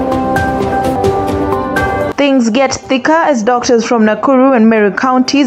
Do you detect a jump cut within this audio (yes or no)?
yes